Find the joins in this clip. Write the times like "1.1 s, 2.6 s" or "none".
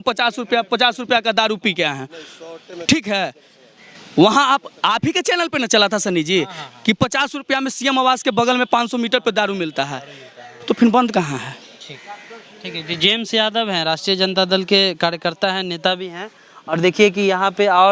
none